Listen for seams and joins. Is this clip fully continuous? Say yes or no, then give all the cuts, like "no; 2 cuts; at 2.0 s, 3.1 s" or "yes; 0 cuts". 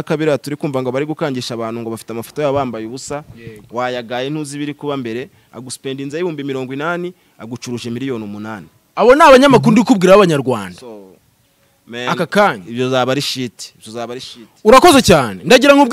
yes; 0 cuts